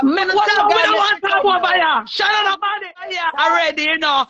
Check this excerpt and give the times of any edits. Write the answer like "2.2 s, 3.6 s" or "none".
3.1 s